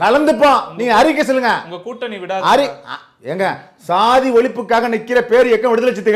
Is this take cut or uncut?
uncut